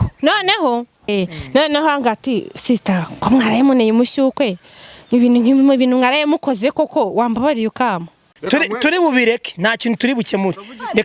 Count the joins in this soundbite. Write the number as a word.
two